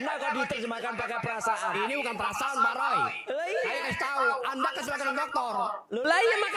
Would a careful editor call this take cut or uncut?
uncut